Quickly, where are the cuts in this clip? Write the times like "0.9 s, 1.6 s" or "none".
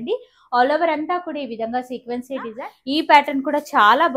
2.7 s